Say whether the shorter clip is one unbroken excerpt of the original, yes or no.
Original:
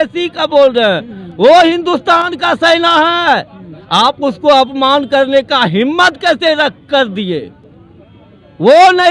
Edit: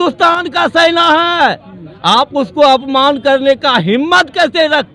yes